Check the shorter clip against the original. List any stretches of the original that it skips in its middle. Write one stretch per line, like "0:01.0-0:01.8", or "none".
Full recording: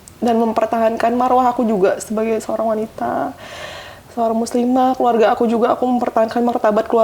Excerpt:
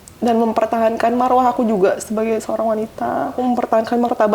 0:03.4-0:05.8

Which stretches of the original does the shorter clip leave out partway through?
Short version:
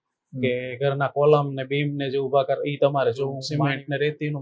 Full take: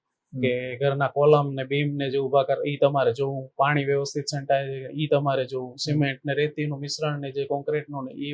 0:03.4-0:05.8

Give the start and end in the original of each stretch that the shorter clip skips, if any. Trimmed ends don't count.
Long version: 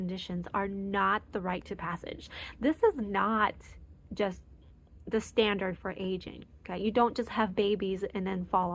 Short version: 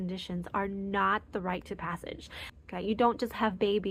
0:02.4-0:06.4

